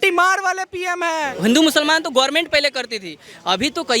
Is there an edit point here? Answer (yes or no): yes